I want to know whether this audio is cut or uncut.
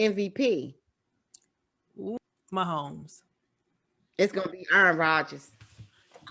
cut